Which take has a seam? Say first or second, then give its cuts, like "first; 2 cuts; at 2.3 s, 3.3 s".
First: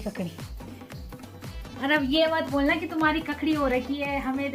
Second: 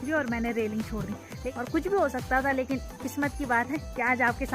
second; 1 cut; at 1.3 s